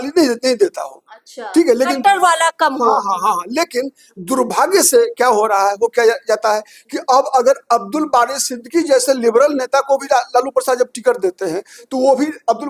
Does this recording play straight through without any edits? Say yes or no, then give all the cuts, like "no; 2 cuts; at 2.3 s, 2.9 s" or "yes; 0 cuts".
yes; 0 cuts